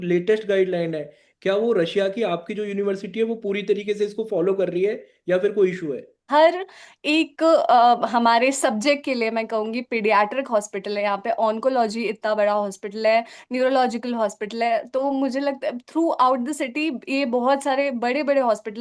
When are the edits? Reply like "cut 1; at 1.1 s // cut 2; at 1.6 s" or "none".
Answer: cut 1; at 6.3 s